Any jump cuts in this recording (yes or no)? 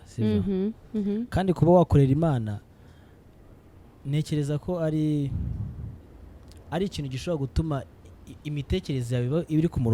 no